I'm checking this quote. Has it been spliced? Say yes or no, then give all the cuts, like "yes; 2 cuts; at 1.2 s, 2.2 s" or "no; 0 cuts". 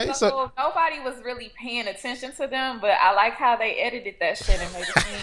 no; 0 cuts